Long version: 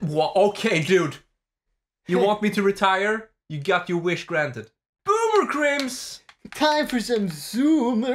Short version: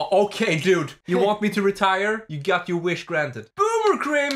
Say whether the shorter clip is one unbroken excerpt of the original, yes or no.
no